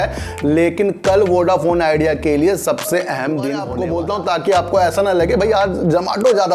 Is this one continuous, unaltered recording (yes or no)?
no